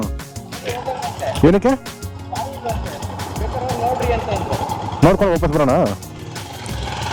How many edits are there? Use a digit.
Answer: 0